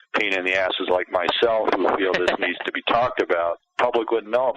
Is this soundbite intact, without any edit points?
no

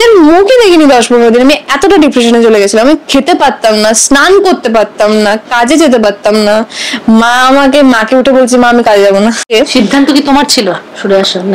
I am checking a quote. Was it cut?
yes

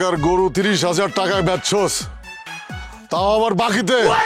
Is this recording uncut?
yes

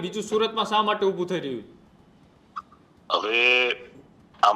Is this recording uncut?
yes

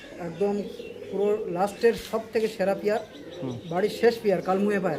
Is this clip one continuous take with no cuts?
yes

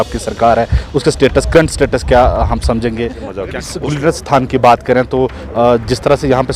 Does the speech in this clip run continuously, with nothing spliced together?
no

